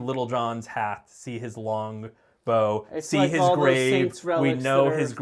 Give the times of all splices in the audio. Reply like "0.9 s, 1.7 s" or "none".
none

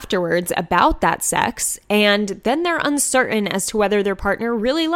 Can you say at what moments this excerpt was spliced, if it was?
none

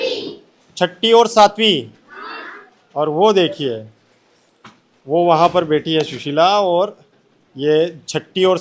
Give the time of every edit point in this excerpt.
none

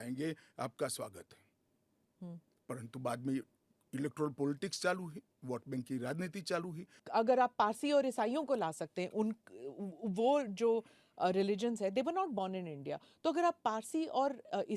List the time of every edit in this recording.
7.0 s

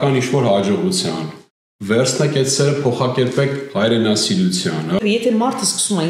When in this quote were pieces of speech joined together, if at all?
5.0 s

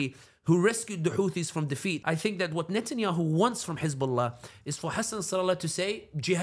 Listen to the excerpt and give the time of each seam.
2.0 s

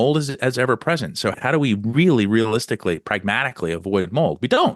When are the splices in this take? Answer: 1.4 s

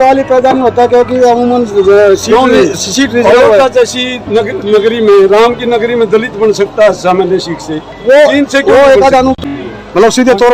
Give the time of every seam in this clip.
9.4 s

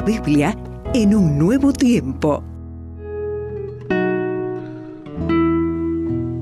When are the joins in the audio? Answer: 3.2 s

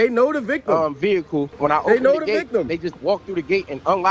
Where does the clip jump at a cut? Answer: 1.5 s

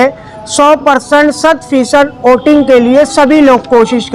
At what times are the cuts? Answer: none

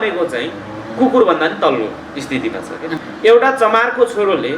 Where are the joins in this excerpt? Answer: 3.0 s

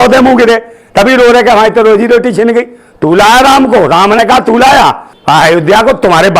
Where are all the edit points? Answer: 5.1 s

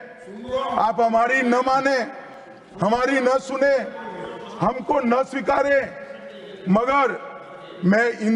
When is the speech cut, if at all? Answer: none

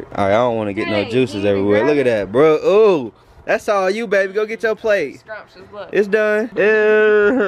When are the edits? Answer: 6.5 s

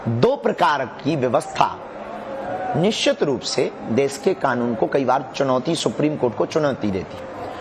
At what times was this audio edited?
6.1 s

